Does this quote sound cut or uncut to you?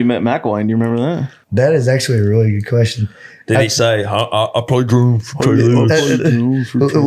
cut